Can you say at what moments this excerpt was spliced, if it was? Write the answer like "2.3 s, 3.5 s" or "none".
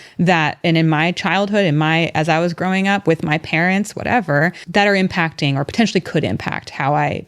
4.6 s